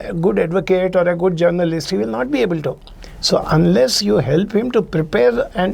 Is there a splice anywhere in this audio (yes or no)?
no